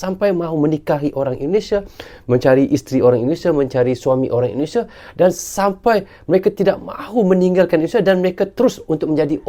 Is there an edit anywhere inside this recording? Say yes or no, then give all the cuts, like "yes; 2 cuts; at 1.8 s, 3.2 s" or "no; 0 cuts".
no; 0 cuts